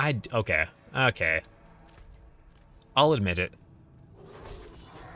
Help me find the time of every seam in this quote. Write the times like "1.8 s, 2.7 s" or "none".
none